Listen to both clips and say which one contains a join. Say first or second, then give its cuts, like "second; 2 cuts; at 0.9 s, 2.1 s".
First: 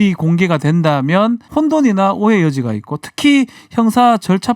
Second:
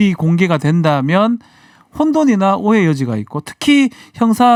first; 1 cut; at 1.4 s